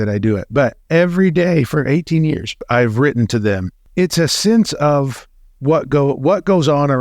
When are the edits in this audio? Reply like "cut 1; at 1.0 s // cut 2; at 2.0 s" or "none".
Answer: cut 1; at 2.6 s // cut 2; at 3.8 s